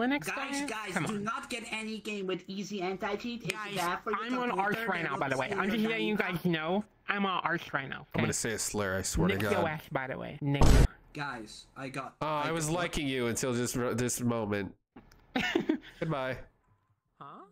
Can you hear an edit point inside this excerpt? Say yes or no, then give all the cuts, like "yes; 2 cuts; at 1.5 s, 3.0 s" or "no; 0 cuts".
no; 0 cuts